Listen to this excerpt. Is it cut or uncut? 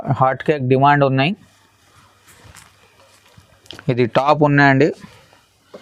uncut